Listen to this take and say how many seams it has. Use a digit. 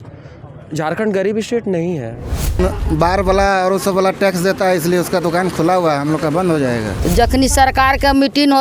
2